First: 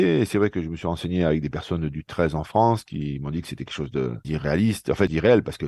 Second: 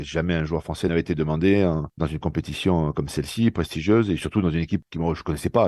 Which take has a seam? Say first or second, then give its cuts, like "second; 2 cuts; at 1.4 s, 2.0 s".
second; 1 cut; at 0.9 s